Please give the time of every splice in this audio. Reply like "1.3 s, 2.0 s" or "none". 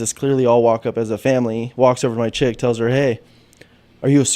none